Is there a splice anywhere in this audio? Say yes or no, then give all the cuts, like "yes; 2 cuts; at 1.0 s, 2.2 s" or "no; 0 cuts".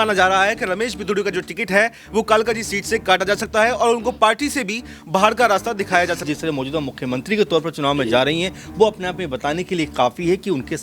yes; 1 cut; at 6.3 s